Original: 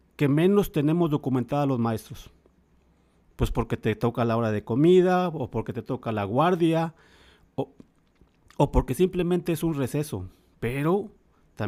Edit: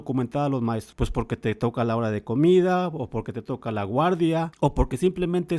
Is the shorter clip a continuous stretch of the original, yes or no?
no